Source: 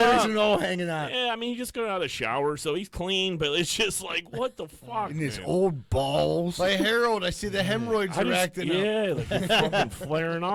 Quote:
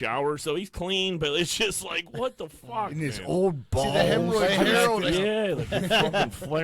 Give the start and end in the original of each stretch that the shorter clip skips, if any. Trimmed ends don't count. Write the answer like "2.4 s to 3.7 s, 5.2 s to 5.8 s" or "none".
7.2 s to 8.6 s